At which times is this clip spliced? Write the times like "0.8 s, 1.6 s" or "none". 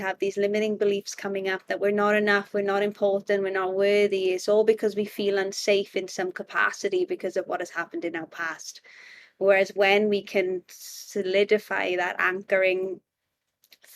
none